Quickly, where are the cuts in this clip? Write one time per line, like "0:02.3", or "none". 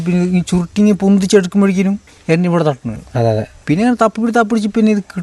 0:02.1
0:03.5